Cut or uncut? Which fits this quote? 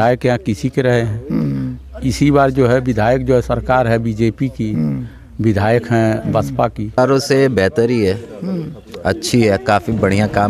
cut